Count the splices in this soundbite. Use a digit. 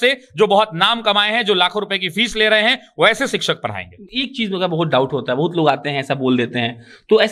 0